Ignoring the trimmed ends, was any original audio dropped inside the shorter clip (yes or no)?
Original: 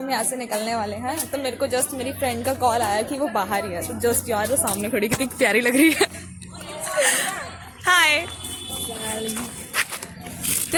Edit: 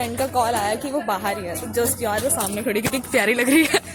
no